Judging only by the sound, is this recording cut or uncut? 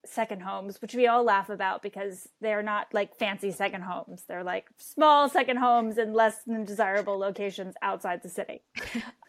uncut